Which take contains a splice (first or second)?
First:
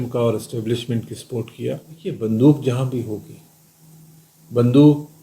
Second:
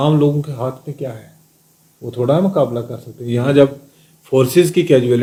first